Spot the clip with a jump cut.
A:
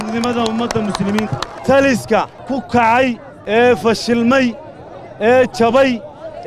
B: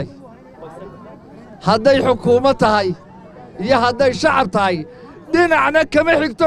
A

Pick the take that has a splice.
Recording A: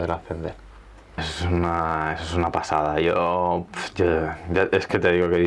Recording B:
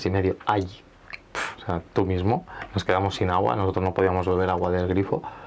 A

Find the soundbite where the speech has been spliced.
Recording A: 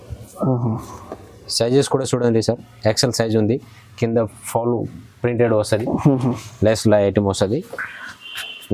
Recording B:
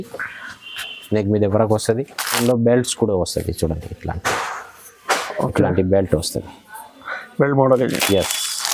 B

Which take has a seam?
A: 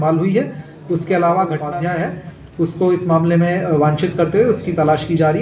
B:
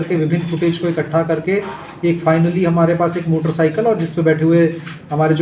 A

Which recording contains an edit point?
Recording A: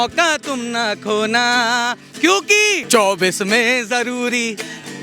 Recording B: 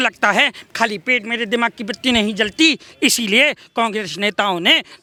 A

